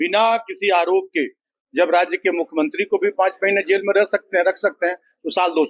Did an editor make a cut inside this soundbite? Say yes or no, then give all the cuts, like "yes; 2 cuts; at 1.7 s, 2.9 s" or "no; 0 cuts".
no; 0 cuts